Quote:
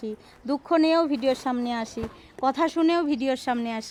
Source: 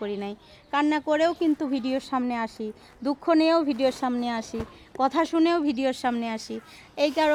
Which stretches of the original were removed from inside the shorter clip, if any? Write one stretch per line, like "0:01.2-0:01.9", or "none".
none